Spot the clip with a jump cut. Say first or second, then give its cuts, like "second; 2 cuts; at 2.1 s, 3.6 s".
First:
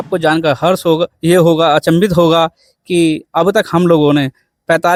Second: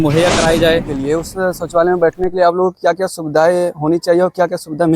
second; 1 cut; at 0.9 s